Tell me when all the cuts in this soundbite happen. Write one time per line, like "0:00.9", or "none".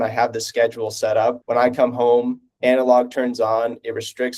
0:01.4
0:02.4